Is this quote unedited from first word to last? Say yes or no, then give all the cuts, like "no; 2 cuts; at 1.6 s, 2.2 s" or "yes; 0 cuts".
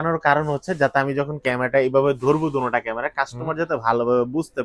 yes; 0 cuts